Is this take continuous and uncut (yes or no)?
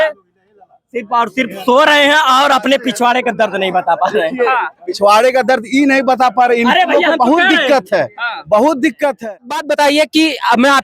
no